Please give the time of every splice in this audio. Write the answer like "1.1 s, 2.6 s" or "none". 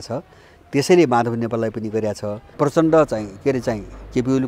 2.4 s

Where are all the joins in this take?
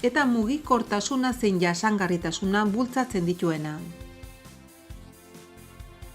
3.9 s

